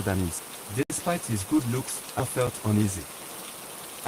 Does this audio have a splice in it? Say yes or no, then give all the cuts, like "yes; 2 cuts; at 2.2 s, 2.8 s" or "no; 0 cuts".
yes; 2 cuts; at 1.0 s, 2.3 s